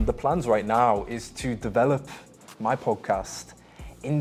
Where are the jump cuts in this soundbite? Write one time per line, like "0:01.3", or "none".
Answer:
none